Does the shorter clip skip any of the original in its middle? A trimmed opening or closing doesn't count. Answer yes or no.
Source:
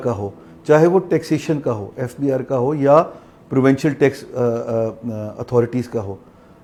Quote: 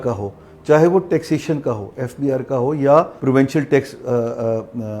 yes